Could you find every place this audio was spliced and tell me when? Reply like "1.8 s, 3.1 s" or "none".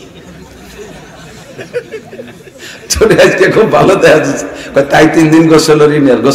none